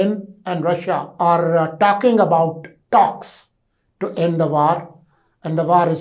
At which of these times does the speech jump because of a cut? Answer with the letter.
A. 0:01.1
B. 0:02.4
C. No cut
A